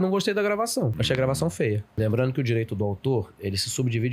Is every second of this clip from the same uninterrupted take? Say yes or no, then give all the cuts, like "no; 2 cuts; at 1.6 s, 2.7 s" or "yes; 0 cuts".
no; 2 cuts; at 1.0 s, 1.9 s